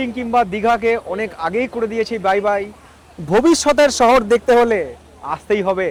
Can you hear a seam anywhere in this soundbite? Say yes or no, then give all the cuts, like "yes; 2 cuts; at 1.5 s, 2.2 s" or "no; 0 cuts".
no; 0 cuts